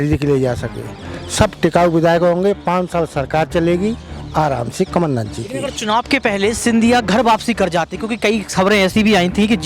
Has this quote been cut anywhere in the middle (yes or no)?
no